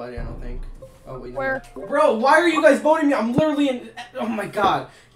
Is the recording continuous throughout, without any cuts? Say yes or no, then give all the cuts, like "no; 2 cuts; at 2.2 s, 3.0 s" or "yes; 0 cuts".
no; 1 cut; at 1.3 s